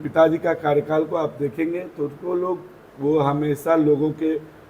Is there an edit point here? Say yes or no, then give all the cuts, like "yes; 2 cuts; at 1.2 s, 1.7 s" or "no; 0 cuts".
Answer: no; 0 cuts